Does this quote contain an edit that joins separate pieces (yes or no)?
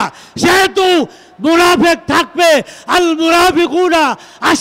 no